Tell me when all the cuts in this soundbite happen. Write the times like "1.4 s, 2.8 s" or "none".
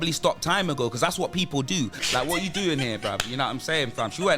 2.0 s